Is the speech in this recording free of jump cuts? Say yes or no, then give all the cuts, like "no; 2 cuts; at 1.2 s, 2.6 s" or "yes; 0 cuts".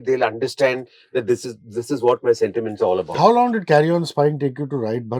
no; 1 cut; at 3.1 s